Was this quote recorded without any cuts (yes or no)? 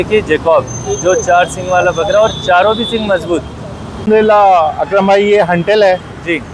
no